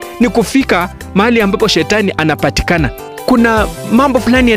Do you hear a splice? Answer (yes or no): yes